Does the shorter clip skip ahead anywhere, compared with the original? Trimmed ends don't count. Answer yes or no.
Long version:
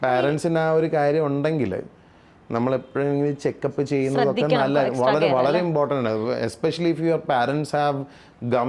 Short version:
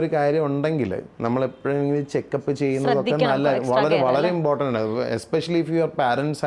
yes